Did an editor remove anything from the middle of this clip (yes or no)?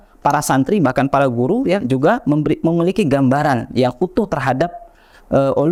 no